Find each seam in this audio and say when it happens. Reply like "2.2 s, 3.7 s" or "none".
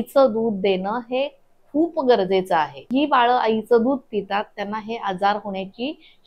2.8 s